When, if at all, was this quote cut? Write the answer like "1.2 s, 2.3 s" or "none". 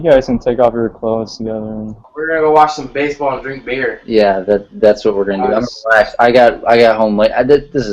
2.1 s